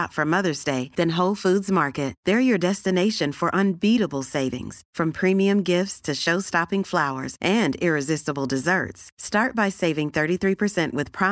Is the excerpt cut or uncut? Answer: uncut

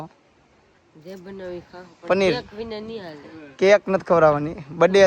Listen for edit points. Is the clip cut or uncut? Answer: uncut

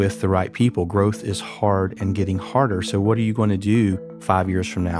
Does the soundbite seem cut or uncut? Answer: cut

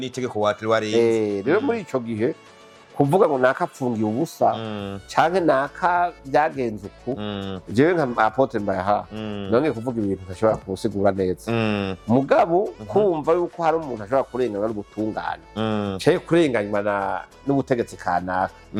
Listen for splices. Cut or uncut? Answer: uncut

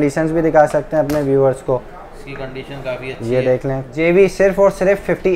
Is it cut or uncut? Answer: cut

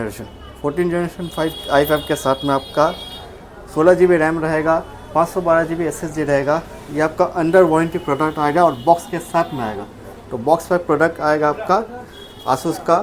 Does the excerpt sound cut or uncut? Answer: uncut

